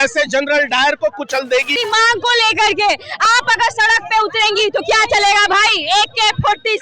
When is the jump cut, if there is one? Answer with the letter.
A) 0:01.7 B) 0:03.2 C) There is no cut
A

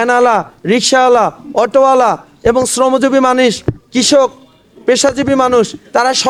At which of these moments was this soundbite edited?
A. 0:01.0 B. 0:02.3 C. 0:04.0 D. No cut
D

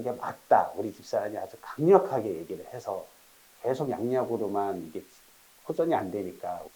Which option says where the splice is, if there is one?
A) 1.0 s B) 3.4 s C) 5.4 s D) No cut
B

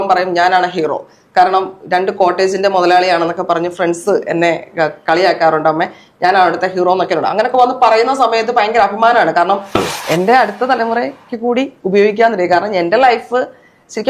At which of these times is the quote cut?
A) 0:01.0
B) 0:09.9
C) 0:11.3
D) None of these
B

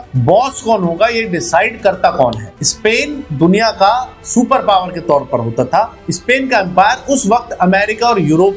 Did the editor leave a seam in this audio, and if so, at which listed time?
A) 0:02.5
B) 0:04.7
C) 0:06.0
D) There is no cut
A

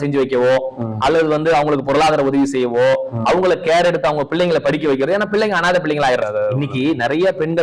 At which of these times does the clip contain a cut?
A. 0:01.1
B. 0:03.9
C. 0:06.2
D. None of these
C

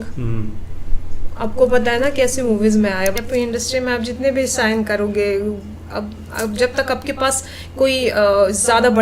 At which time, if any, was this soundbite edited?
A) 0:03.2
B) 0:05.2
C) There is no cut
A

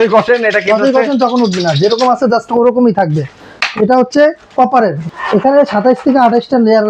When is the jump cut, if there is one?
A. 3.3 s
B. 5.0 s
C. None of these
B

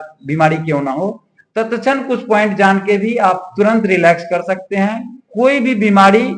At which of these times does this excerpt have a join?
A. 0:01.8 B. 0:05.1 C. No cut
B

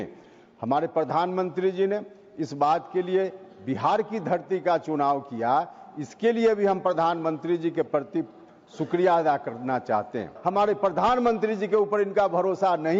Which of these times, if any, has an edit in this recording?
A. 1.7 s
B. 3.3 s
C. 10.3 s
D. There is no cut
C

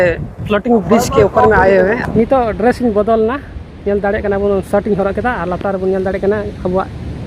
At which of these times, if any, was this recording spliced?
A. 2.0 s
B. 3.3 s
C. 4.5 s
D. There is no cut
A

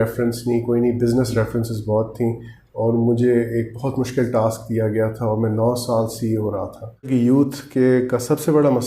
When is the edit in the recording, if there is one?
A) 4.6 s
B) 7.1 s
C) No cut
B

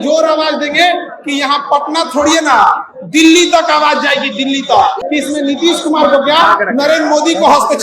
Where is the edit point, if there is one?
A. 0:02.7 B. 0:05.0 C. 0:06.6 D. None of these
B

